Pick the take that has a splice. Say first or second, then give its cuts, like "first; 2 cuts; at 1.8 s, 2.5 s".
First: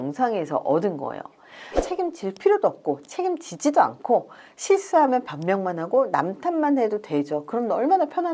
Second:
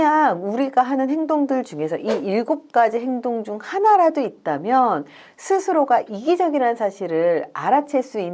first; 1 cut; at 1.8 s